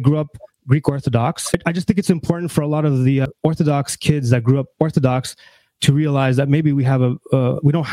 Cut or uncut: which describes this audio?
cut